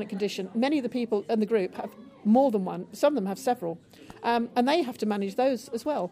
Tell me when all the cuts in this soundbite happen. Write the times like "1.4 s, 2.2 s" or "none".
none